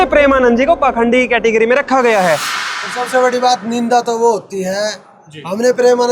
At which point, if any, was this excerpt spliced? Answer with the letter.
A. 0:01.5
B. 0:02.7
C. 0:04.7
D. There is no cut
B